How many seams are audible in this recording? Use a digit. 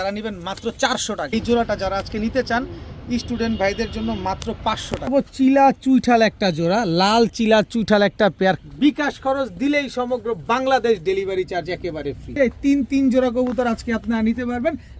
4